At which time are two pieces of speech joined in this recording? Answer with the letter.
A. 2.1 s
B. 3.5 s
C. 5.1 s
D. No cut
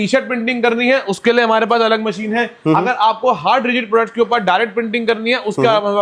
D